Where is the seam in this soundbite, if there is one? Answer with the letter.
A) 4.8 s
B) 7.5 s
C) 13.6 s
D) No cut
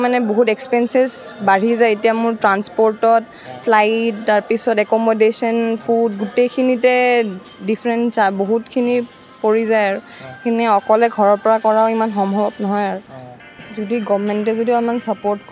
C